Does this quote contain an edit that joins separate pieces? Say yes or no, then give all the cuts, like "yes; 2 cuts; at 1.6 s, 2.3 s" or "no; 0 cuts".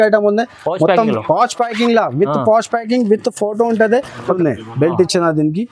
yes; 1 cut; at 4.3 s